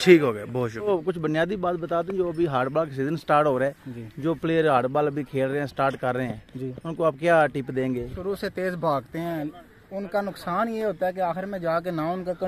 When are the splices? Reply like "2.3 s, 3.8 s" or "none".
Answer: 0.9 s, 8.1 s